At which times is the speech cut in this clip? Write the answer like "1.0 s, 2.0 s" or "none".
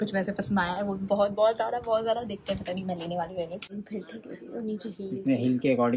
3.7 s